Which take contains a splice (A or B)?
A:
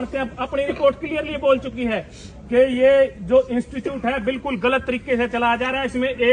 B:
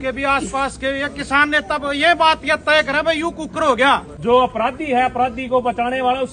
B